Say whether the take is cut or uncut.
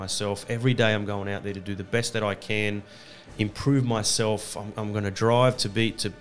uncut